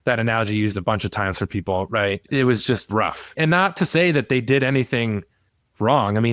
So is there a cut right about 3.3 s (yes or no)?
yes